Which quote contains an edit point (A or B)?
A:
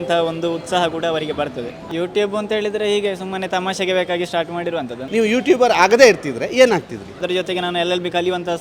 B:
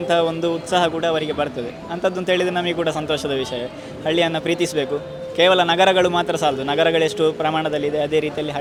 A